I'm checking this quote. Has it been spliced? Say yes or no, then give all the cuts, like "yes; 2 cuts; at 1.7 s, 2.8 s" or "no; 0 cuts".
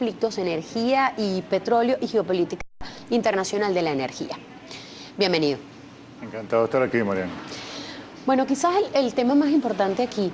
no; 0 cuts